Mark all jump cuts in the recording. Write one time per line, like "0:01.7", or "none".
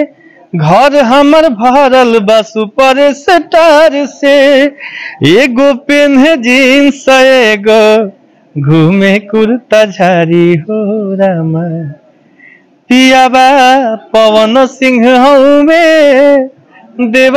none